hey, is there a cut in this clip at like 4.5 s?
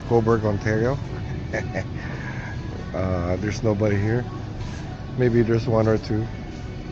no; 0 cuts

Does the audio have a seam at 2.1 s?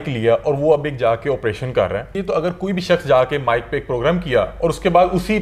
yes; 1 cut; at 2.1 s

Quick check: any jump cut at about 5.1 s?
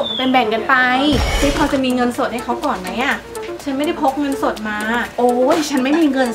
no; 0 cuts

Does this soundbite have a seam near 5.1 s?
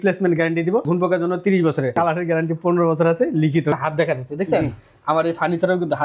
no; 3 cuts; at 0.8 s, 1.9 s, 3.7 s

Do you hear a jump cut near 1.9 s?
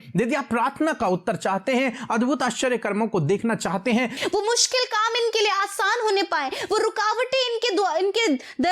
no; 1 cut; at 4.2 s

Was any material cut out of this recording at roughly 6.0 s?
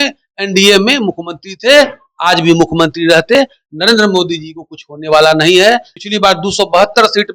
yes; 1 cut; at 6.0 s

